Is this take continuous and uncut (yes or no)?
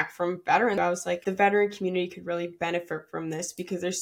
no